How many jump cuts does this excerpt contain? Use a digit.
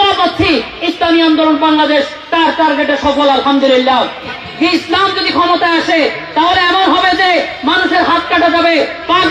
1